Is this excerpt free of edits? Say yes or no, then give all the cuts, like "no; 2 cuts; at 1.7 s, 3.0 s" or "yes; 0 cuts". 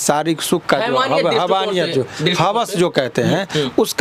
yes; 0 cuts